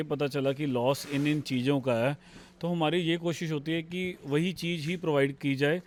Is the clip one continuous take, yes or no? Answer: yes